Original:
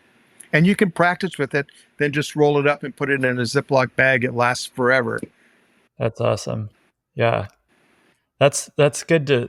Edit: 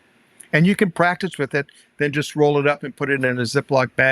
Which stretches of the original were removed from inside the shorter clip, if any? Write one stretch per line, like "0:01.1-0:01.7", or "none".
none